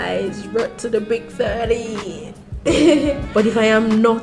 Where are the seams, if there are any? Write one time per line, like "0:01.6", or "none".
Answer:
0:03.2